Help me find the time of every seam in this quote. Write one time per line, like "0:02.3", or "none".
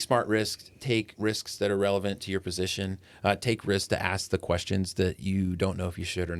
0:01.1

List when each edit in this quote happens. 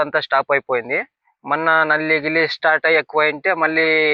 none

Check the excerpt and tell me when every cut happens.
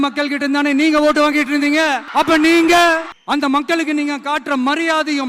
0:02.0
0:03.1

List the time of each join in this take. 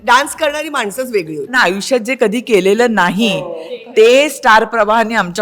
0:01.5

